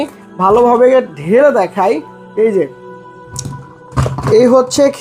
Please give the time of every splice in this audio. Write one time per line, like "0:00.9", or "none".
0:03.4